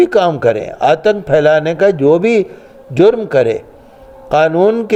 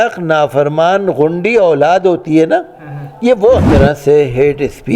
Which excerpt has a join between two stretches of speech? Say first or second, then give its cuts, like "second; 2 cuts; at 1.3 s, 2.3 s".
second; 1 cut; at 3.7 s